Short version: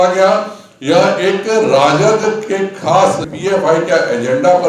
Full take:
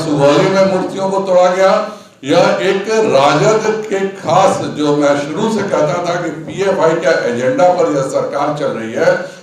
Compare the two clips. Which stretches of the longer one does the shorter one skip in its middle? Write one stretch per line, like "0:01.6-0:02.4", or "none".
0:04.7-0:06.4